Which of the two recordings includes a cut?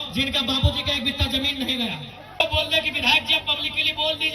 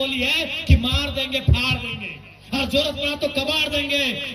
first; 1 cut; at 2.4 s

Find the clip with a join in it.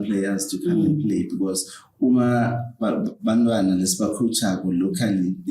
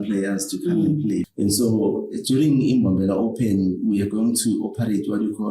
second; 1 cut; at 1.3 s

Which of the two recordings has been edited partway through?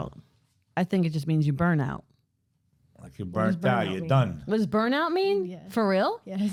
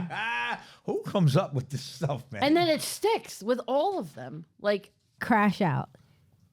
second; 1 cut; at 5.1 s

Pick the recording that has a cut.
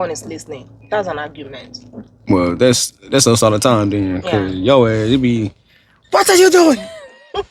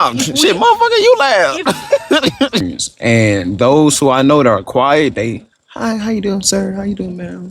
second; 1 cut; at 2.6 s

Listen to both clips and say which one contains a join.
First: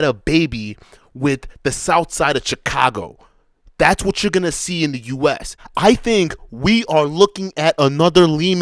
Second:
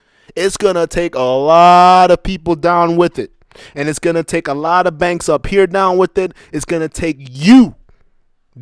first; 1 cut; at 5.5 s

